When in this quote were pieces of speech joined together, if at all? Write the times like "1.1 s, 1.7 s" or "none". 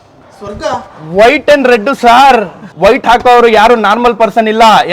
2.6 s

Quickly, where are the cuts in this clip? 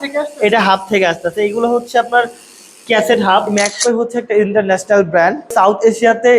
3.5 s, 5.5 s

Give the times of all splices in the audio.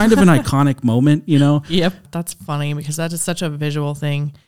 2.0 s

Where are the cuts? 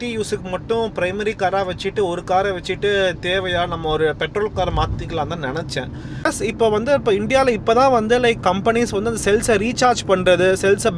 6.3 s

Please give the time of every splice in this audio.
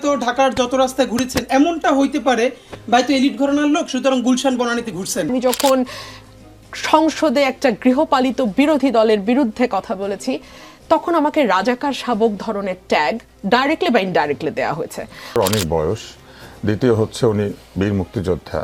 5.3 s, 15.4 s

